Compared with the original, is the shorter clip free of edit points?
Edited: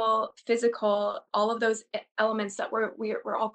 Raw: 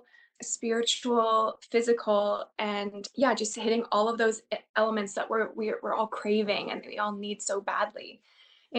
no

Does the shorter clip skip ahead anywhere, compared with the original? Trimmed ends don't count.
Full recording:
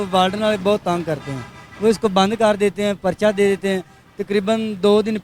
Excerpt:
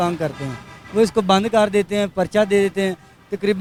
no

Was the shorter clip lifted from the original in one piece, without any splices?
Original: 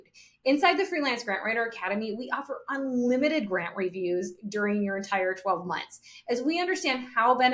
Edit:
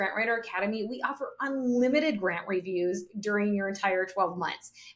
yes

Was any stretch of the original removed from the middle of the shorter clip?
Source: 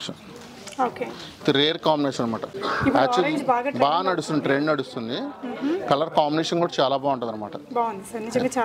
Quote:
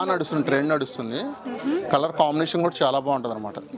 no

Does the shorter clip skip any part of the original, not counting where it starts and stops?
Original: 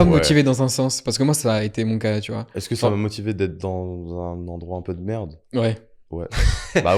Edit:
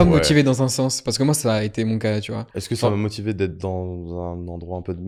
no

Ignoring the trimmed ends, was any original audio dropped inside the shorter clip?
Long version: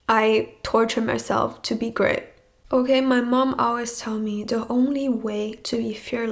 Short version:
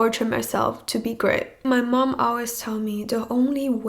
yes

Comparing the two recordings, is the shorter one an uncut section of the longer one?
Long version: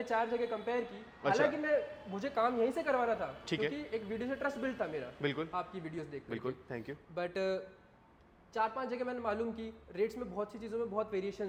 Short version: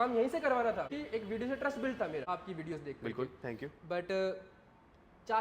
no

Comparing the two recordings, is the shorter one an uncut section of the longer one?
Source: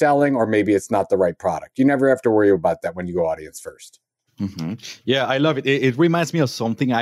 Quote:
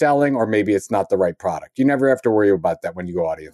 yes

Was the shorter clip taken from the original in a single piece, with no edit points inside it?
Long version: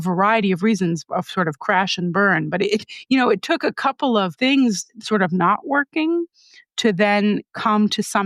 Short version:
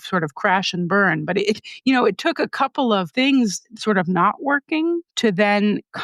no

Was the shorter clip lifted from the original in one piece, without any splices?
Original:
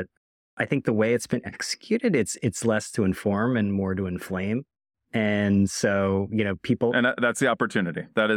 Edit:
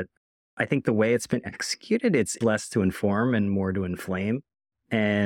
no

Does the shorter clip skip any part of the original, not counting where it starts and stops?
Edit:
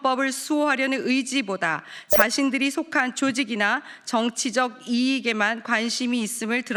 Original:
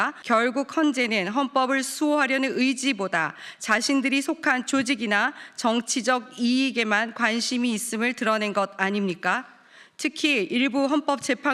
no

